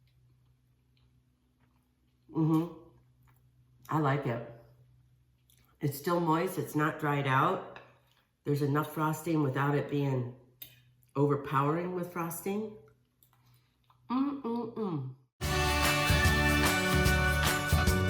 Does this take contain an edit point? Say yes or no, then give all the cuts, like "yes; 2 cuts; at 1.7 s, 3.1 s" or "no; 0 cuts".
yes; 1 cut; at 15.3 s